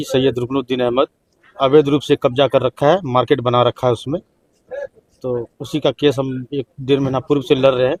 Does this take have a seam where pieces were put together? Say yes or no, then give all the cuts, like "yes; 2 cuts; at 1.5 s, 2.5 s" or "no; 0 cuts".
no; 0 cuts